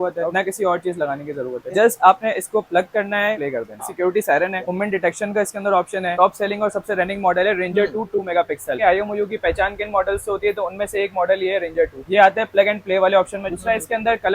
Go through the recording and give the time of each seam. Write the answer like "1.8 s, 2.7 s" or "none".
3.4 s, 6.1 s, 8.8 s